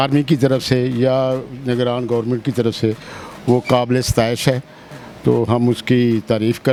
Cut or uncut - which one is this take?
uncut